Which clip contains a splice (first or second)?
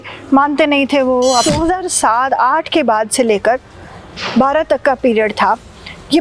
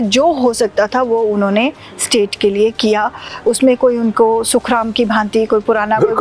first